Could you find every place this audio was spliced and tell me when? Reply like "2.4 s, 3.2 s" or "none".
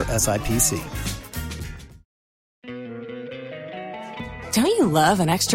2.7 s